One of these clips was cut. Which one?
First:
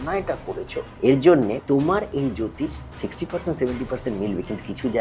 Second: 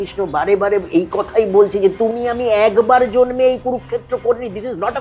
first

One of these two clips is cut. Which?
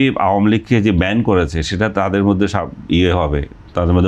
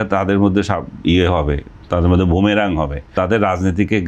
second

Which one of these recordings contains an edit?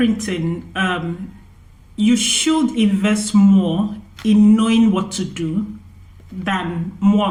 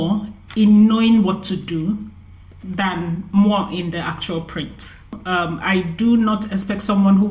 second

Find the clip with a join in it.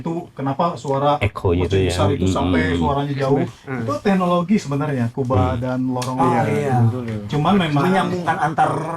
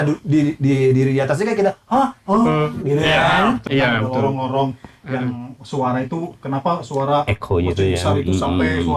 second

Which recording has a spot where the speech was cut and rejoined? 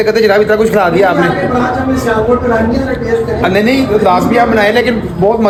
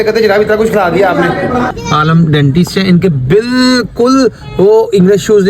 second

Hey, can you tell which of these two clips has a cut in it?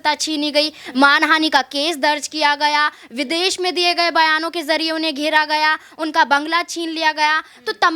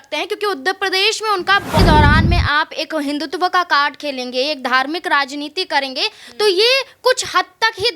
second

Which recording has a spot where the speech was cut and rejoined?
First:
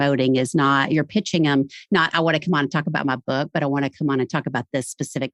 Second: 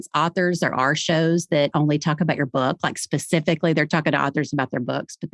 second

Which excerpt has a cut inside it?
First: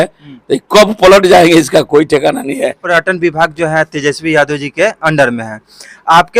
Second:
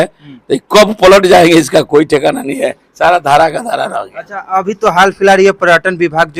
first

